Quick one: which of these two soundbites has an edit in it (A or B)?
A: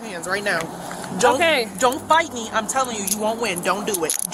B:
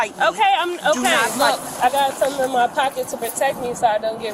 B